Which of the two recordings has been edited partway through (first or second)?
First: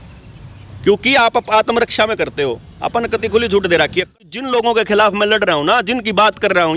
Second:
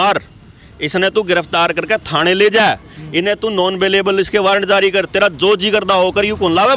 first